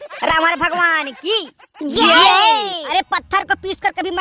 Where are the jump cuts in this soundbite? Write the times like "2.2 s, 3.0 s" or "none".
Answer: 2.9 s